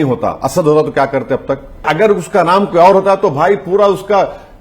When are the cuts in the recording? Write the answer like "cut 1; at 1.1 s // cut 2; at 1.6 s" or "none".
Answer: cut 1; at 1.8 s